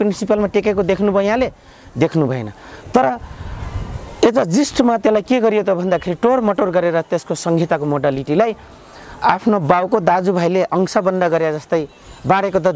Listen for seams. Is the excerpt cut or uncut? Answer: uncut